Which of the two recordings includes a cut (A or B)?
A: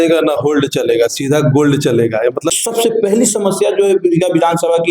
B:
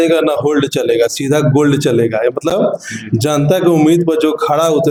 A